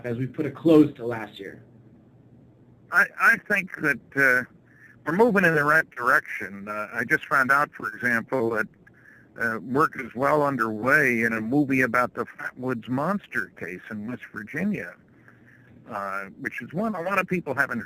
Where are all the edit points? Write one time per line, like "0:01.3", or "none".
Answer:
0:09.7

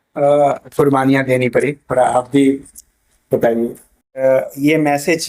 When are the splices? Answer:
0:04.2

